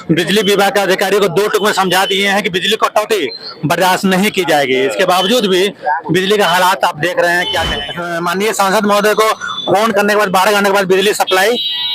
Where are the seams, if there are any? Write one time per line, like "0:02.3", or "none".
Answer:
0:08.2